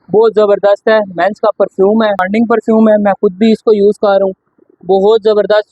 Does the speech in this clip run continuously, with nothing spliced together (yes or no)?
no